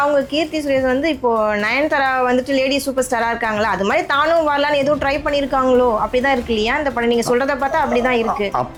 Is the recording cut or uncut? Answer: uncut